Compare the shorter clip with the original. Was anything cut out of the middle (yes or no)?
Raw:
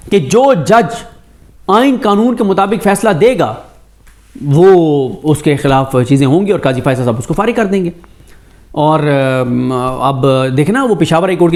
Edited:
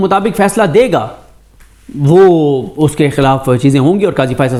no